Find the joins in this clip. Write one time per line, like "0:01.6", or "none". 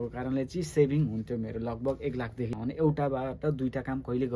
0:02.5